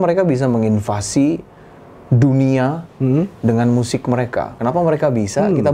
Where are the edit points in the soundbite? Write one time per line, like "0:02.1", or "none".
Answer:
0:04.5